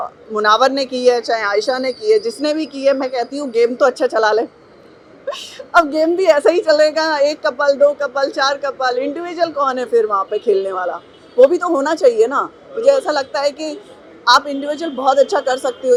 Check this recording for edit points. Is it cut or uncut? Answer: uncut